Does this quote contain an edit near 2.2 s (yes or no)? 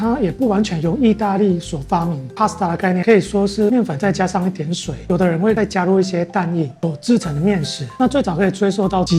no